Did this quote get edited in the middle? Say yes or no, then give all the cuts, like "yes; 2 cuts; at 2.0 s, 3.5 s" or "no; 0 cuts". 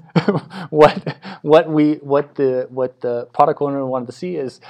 no; 0 cuts